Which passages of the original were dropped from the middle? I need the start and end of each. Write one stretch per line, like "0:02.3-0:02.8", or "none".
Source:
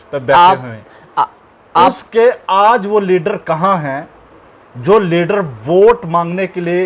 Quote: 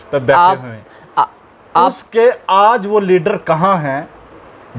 none